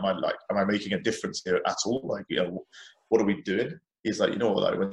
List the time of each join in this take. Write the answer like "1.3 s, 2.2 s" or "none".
3.8 s